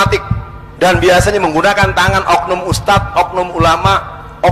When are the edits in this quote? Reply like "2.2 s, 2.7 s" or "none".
none